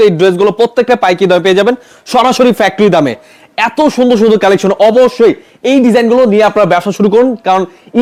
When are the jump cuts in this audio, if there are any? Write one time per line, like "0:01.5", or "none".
none